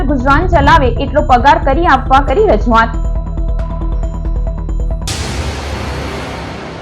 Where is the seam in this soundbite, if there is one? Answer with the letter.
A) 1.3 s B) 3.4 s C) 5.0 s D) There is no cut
C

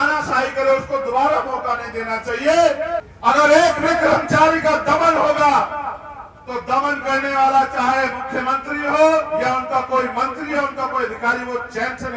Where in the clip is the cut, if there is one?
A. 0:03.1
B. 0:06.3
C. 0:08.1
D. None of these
A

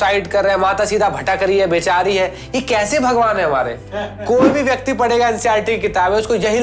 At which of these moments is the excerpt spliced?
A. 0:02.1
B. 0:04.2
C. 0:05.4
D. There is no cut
D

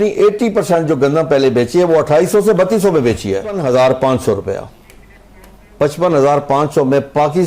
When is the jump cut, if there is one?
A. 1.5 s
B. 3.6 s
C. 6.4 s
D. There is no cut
B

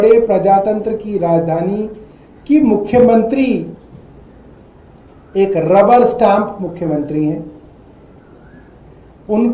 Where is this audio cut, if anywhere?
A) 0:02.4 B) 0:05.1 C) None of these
C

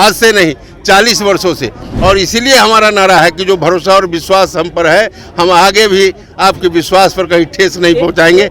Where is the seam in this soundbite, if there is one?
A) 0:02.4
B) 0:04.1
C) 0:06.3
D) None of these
D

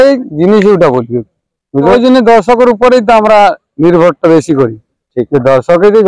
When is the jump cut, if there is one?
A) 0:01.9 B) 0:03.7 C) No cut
A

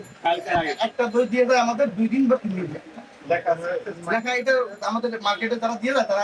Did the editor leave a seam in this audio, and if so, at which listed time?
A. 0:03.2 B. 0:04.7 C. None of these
A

